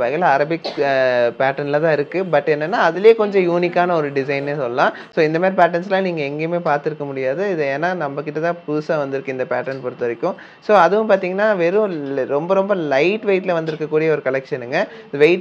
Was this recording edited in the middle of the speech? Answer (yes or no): no